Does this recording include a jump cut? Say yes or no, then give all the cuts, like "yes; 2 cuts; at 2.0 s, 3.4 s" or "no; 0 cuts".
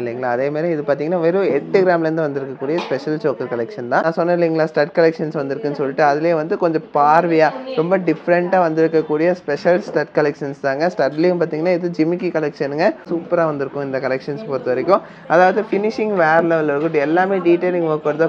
yes; 2 cuts; at 4.0 s, 13.1 s